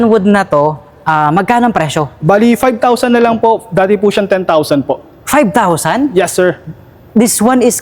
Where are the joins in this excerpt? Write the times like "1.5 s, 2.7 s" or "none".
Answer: none